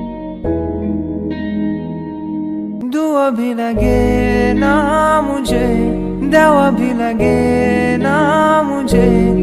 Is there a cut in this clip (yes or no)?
no